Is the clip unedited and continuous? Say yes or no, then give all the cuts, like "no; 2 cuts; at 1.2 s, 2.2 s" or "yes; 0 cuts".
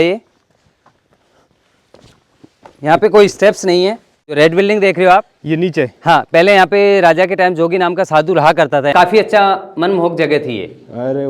no; 2 cuts; at 4.4 s, 8.9 s